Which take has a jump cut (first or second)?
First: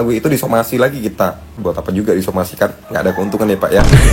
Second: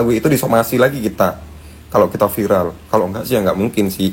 first